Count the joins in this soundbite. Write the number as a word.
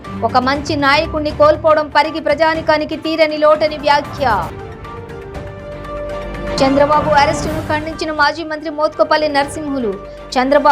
zero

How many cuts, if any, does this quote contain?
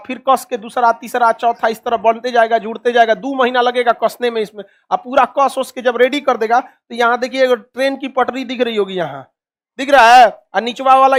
zero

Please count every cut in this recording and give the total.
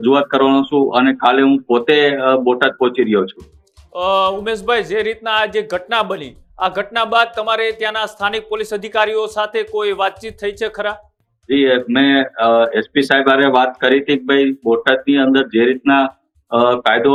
zero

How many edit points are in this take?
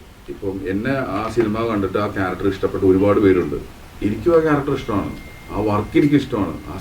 zero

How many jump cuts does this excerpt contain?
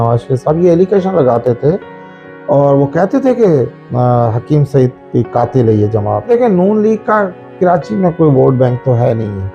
one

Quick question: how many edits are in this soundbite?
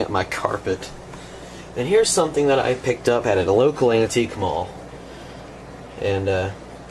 one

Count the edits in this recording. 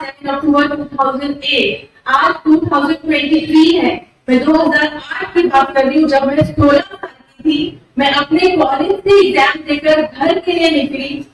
zero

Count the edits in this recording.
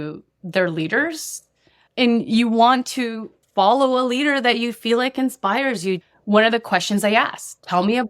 one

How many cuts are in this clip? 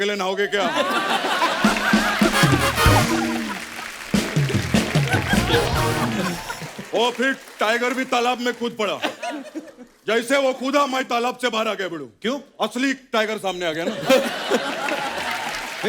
zero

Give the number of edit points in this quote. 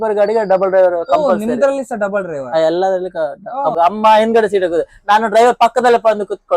one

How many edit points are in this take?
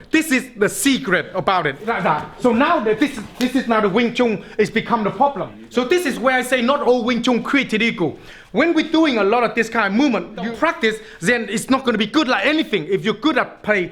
three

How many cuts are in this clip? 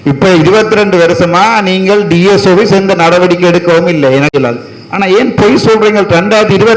one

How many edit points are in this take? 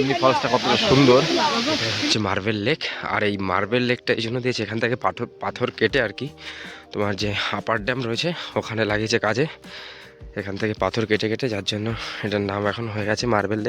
one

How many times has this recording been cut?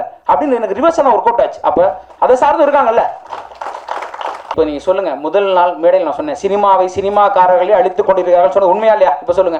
one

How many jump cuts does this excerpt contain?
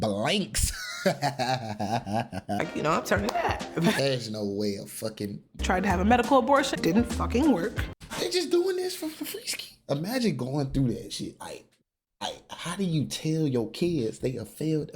three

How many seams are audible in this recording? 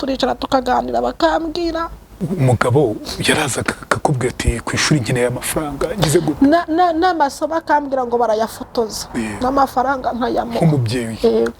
one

